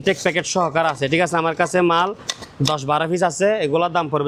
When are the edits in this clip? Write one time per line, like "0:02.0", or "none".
none